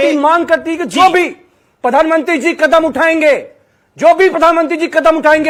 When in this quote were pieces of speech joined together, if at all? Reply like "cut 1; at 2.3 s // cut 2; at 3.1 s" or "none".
none